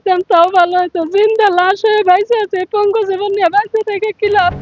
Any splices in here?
no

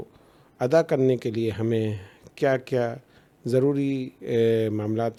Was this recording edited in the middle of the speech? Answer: no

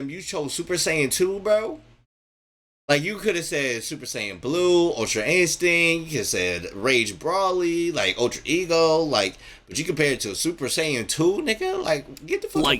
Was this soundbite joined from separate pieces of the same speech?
no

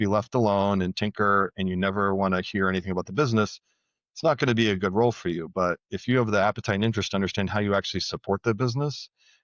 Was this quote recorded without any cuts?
yes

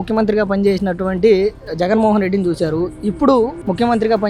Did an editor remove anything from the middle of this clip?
no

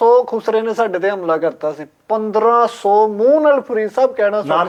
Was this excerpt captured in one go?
yes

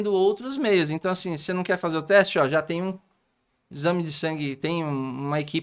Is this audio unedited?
yes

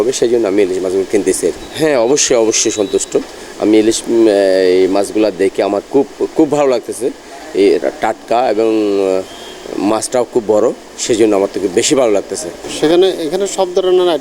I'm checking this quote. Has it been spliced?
no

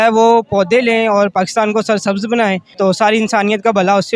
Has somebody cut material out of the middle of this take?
yes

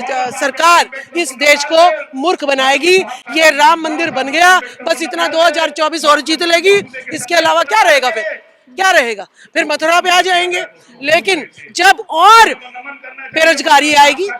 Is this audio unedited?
yes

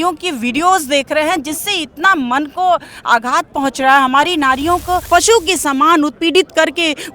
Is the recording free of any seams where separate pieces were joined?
no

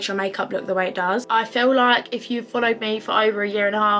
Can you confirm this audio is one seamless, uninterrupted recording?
no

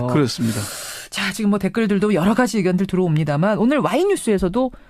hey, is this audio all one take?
no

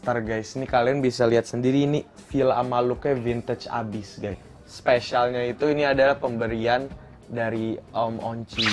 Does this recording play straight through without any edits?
no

